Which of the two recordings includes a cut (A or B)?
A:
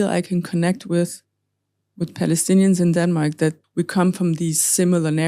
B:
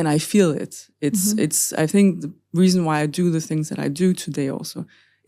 A